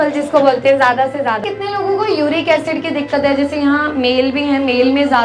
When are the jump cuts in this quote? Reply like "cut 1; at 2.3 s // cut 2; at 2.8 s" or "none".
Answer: cut 1; at 1.4 s